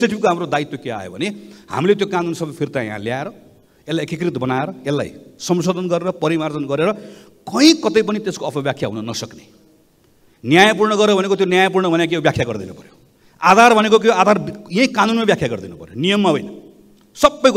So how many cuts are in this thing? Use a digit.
0